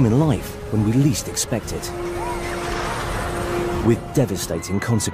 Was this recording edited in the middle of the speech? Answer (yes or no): yes